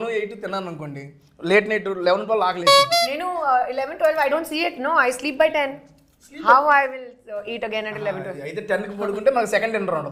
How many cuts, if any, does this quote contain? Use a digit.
0